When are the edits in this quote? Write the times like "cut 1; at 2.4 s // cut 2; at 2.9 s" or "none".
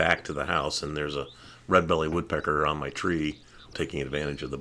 cut 1; at 3.7 s